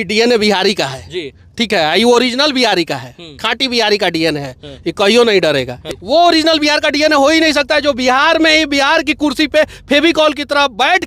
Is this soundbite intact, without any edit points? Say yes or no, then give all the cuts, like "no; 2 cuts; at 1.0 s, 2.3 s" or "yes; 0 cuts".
no; 1 cut; at 5.8 s